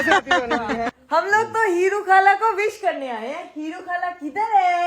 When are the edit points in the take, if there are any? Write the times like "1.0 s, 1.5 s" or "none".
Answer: 1.0 s

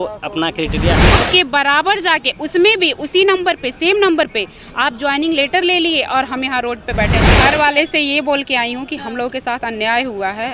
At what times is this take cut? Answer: 1.1 s, 7.3 s

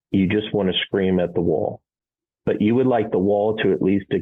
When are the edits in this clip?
none

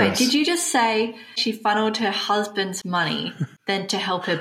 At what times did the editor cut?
1.4 s, 3.5 s

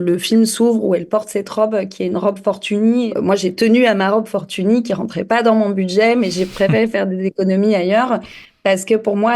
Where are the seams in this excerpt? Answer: 3.1 s

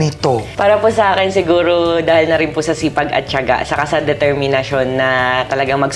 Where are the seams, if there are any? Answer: none

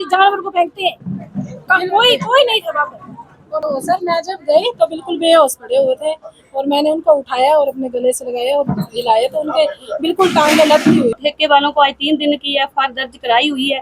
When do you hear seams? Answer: 3.5 s, 11.2 s

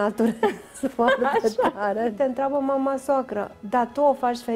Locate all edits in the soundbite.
2.1 s

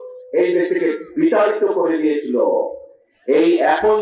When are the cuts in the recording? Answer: none

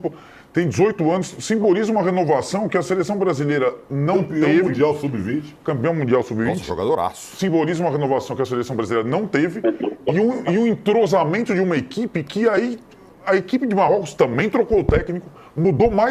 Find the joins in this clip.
none

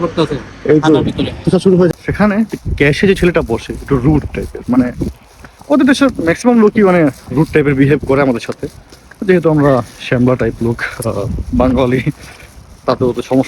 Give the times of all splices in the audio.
1.9 s

